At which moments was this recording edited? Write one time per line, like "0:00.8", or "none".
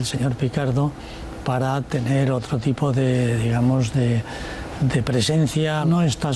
0:05.2